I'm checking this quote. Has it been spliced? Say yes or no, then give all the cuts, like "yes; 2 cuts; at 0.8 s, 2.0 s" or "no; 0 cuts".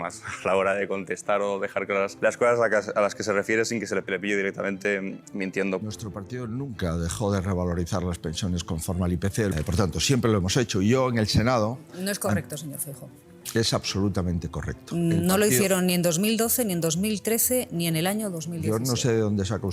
yes; 4 cuts; at 2.1 s, 4.1 s, 5.8 s, 9.5 s